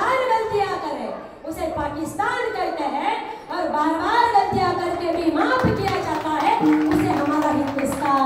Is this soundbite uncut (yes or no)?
yes